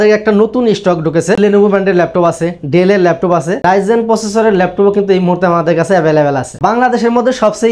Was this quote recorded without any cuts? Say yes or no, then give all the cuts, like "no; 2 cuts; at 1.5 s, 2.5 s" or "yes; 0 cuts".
no; 3 cuts; at 1.4 s, 3.5 s, 6.5 s